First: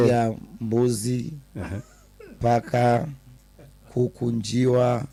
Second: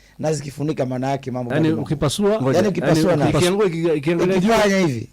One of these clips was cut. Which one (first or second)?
second